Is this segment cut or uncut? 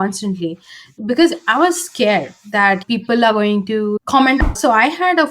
cut